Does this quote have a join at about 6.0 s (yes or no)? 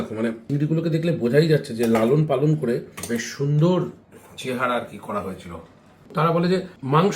yes